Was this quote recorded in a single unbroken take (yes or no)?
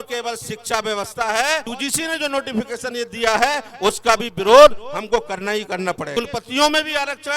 no